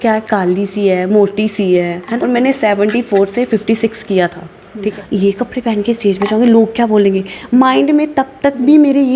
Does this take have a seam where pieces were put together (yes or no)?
yes